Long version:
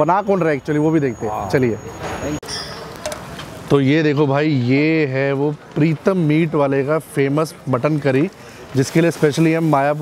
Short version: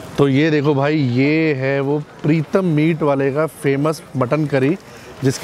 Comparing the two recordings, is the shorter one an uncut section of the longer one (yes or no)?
yes